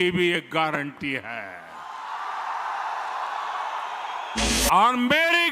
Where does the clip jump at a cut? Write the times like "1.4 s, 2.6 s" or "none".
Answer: 4.4 s